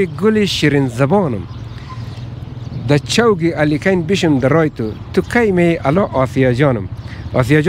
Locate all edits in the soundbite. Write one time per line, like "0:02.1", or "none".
none